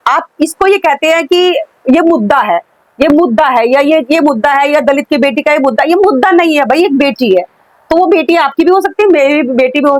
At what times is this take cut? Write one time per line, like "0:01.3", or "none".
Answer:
none